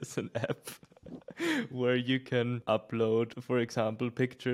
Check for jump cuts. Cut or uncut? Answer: cut